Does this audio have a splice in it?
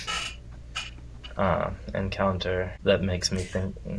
yes; 1 cut; at 2.7 s

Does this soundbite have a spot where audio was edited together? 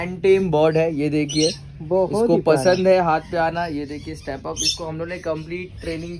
no; 0 cuts

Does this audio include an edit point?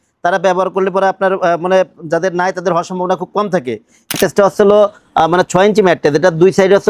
yes; 1 cut; at 4.1 s

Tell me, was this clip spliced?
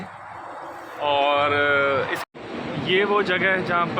yes; 1 cut; at 2.2 s

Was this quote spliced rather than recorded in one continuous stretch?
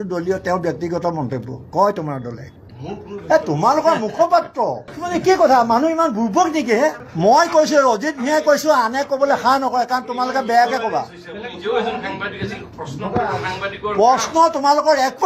no; 0 cuts

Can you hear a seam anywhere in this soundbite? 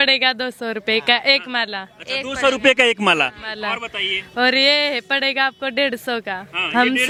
no; 0 cuts

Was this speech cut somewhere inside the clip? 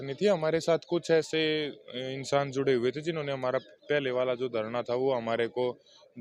no; 0 cuts

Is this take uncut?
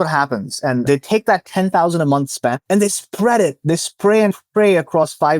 no; 2 cuts; at 0.9 s, 2.6 s

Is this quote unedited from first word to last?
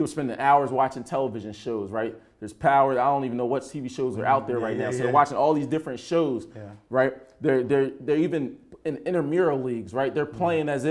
yes; 0 cuts

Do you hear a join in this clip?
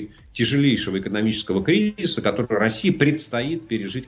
no; 0 cuts

